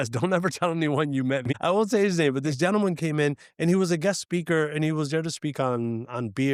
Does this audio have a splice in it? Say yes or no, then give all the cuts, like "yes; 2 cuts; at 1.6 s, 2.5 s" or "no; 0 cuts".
yes; 1 cut; at 1.4 s